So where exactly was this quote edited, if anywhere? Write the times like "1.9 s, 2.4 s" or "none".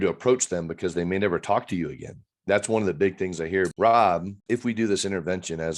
3.7 s, 4.3 s

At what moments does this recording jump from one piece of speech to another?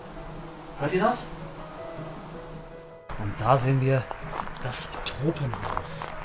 3.1 s

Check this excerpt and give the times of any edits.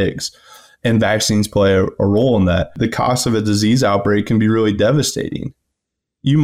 2.8 s

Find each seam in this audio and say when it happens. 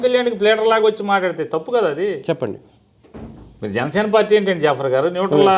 none

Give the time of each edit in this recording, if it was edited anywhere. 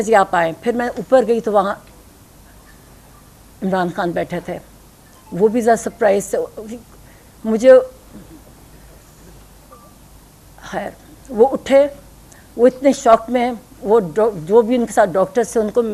none

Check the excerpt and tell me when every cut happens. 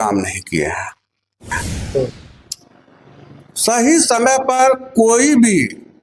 1.5 s

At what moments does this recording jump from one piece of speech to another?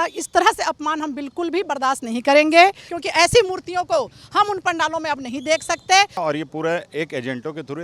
2.9 s, 6.2 s

